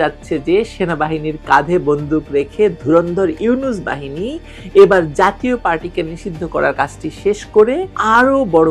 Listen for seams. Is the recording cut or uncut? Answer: uncut